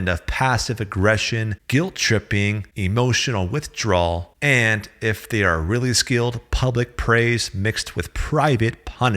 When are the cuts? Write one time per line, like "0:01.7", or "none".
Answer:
0:01.5
0:02.7
0:04.3